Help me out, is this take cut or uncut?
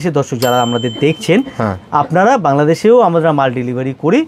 uncut